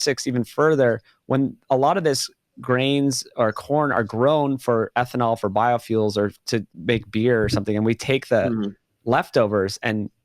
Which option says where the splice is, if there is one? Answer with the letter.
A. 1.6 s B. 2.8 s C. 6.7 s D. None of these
C